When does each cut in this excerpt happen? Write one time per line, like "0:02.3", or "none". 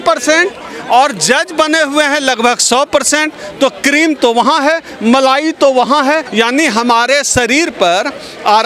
0:06.3